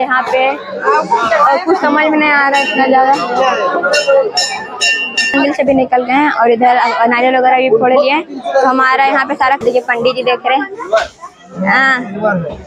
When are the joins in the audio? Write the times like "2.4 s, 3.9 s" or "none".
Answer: 5.3 s, 9.6 s